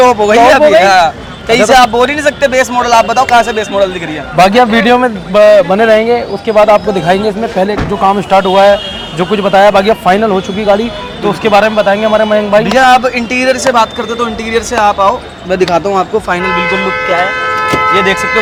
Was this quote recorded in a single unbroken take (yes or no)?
yes